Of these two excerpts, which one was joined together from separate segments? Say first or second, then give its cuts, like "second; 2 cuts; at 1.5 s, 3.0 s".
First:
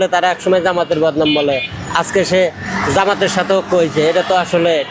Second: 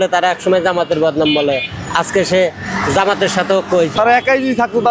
second; 1 cut; at 3.9 s